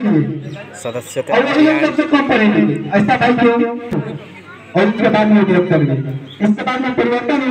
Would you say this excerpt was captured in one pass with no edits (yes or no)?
no